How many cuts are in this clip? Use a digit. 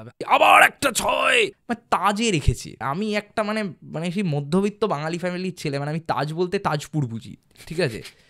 2